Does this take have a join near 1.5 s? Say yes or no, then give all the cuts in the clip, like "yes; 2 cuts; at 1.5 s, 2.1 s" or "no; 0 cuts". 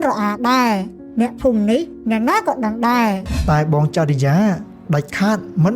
no; 1 cut; at 3.3 s